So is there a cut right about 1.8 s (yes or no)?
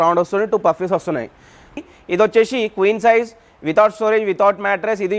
yes